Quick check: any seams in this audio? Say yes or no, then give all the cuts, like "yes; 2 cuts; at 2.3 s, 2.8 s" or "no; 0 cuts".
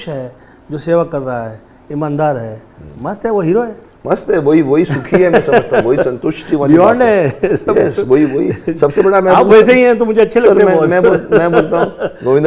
no; 0 cuts